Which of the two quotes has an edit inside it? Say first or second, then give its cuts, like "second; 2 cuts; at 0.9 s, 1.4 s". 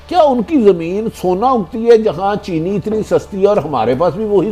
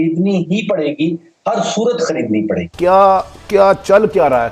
second; 1 cut; at 2.7 s